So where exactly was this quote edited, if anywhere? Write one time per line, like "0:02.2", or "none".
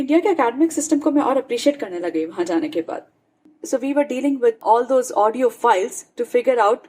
0:03.5